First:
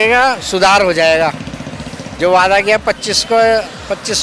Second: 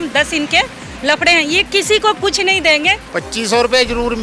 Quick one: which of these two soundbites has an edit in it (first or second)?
second